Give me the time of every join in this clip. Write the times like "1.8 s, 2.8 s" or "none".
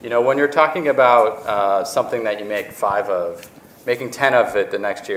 none